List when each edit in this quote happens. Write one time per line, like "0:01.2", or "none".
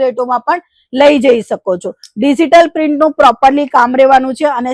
none